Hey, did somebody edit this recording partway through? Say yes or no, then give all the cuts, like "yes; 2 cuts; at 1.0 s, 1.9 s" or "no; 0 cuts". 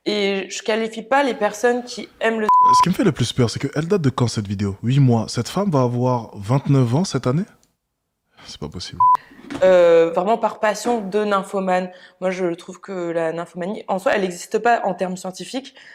no; 0 cuts